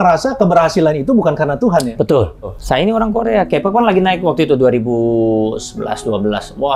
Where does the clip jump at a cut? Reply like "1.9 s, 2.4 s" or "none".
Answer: 2.6 s

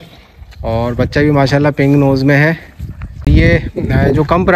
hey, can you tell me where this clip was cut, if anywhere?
3.2 s

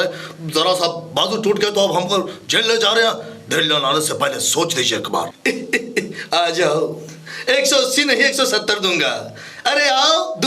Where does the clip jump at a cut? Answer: 5.3 s

